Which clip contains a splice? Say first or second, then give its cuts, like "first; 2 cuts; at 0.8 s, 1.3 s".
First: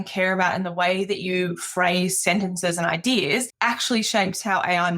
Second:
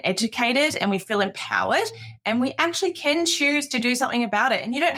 first; 1 cut; at 3.5 s